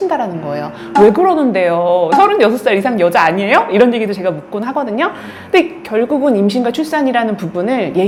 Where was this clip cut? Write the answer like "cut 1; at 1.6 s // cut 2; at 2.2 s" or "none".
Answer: none